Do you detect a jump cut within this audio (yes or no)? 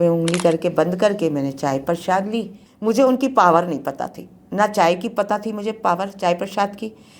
yes